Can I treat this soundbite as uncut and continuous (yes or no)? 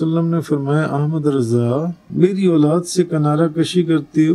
no